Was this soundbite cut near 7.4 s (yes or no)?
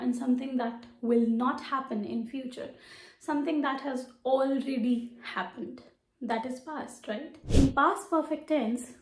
yes